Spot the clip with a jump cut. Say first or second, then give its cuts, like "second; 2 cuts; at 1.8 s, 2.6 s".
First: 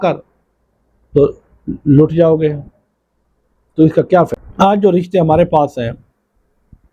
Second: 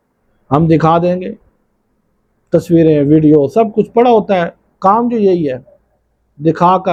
first; 1 cut; at 4.3 s